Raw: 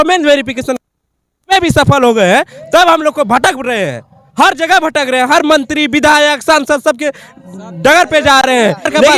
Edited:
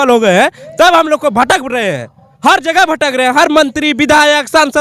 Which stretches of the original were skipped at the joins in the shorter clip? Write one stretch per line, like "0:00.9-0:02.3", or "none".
none

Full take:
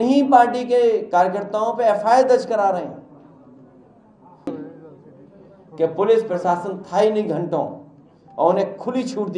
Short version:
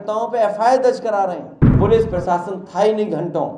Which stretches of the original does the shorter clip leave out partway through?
0:03.2-0:05.9

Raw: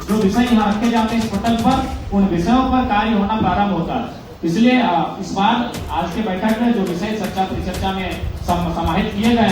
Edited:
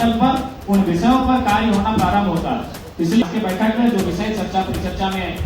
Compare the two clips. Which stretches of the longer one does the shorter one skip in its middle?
0:04.7-0:06.0

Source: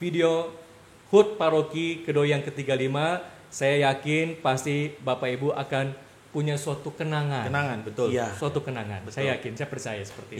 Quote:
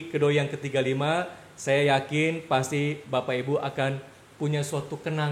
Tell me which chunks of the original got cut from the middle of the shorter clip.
none

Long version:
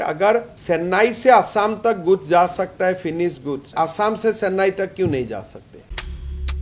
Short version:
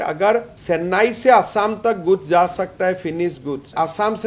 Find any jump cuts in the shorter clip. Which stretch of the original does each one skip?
none

